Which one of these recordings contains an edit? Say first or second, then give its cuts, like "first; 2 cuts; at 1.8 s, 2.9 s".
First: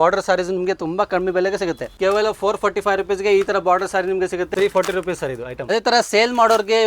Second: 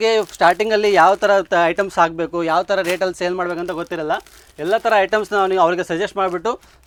first; 3 cuts; at 1.9 s, 4.5 s, 5.6 s